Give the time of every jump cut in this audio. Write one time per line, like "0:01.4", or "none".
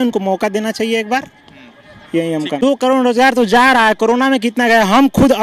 0:02.5